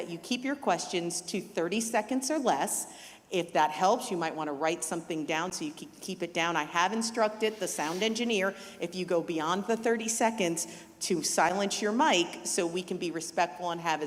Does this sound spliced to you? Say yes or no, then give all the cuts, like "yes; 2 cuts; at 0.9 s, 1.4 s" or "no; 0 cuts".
no; 0 cuts